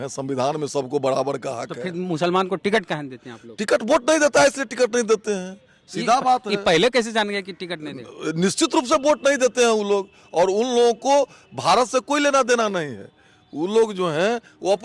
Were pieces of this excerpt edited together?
no; 0 cuts

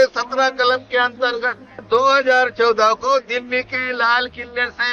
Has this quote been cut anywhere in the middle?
yes; 1 cut; at 1.8 s

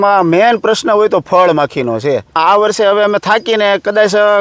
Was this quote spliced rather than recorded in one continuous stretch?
yes; 1 cut; at 2.4 s

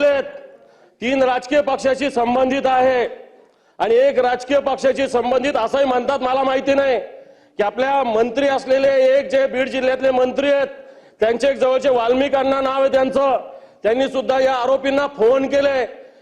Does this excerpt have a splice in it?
no; 0 cuts

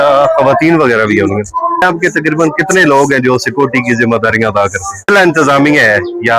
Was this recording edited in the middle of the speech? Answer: yes; 2 cuts; at 1.8 s, 5.1 s

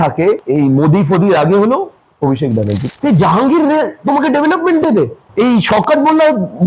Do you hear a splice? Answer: yes; 1 cut; at 2.8 s

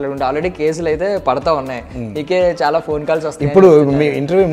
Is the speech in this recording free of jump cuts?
yes; 0 cuts

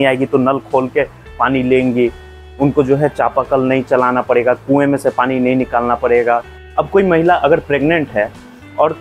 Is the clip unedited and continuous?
no; 1 cut; at 6.6 s

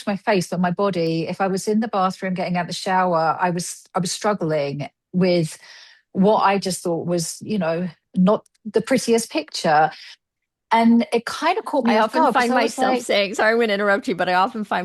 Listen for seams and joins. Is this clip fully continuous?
yes; 0 cuts

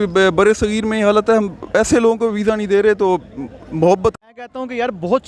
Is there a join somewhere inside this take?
yes; 1 cut; at 4.3 s

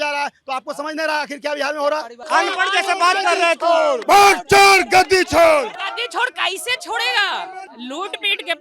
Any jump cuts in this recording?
yes; 4 cuts; at 2.1 s, 4.0 s, 5.7 s, 7.7 s

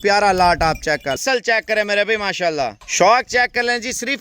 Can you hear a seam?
yes; 1 cut; at 1.2 s

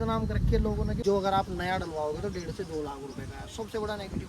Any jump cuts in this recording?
yes; 1 cut; at 1.0 s

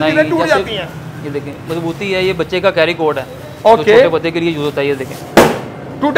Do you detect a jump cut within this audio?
no; 0 cuts

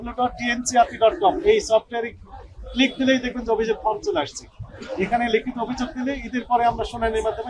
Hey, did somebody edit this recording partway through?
no; 0 cuts

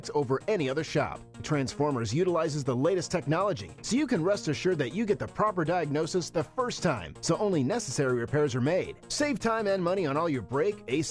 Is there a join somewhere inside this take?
no; 0 cuts

